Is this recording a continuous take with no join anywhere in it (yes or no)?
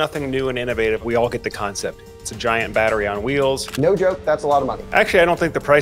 no